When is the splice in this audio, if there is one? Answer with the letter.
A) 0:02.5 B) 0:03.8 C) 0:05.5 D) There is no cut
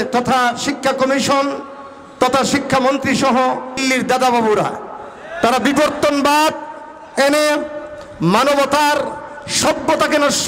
B